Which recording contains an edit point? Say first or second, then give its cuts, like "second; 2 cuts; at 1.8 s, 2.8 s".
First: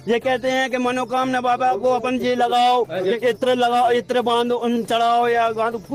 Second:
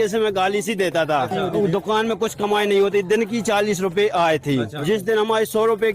second; 2 cuts; at 1.4 s, 4.7 s